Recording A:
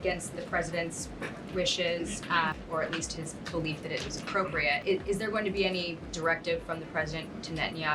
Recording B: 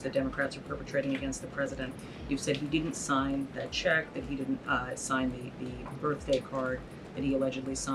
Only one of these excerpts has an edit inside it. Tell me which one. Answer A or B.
A